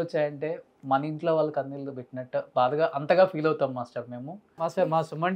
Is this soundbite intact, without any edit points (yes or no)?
no